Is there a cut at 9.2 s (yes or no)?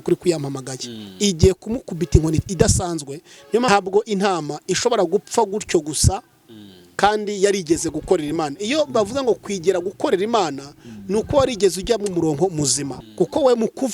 no